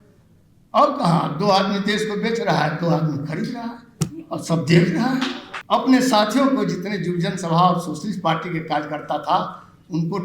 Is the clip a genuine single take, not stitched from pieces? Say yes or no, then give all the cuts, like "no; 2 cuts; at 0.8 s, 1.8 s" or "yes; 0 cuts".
no; 1 cut; at 5.5 s